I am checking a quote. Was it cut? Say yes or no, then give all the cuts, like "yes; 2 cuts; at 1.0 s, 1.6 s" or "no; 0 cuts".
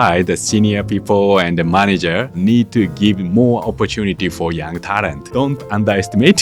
yes; 2 cuts; at 2.4 s, 5.3 s